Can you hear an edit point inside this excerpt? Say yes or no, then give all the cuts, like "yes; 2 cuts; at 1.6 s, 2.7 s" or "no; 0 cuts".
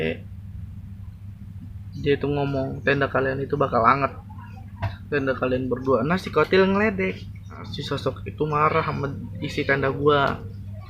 yes; 1 cut; at 7.7 s